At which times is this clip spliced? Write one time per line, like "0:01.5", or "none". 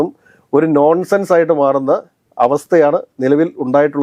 none